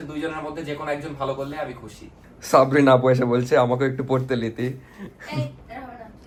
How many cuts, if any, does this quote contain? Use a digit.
0